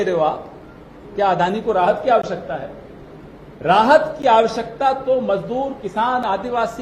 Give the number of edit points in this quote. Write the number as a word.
zero